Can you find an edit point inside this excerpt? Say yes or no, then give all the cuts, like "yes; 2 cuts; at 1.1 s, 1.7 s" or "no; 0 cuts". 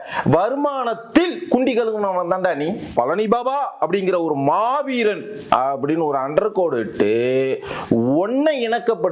yes; 1 cut; at 2.9 s